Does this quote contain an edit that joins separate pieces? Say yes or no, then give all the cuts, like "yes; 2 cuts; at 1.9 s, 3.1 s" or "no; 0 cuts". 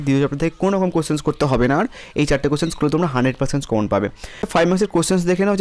yes; 1 cut; at 4.4 s